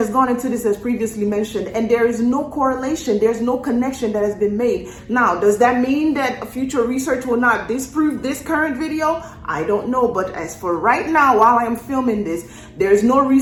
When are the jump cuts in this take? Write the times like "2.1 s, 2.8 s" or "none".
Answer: none

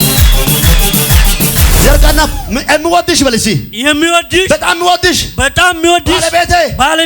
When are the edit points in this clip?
1.7 s

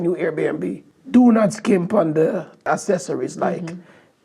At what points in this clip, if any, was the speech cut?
2.5 s

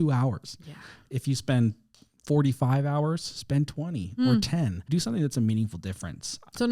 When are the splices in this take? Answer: 4.9 s

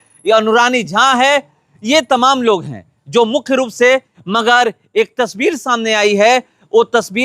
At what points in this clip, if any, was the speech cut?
4.1 s

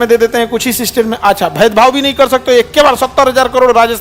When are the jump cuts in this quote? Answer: none

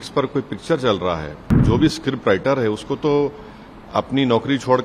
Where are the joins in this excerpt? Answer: 1.6 s

